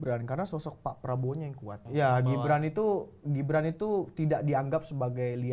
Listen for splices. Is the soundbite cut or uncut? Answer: cut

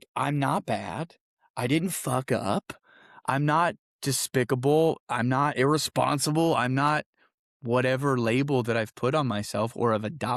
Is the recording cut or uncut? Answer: uncut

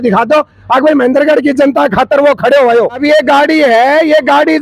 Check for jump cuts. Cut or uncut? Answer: cut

